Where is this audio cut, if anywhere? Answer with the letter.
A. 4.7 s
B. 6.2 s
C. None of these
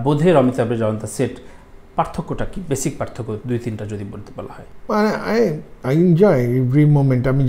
A